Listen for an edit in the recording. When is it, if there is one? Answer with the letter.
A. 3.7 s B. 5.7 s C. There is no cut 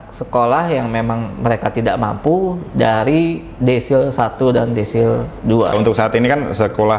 B